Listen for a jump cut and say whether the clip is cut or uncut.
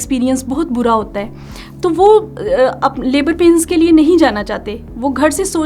uncut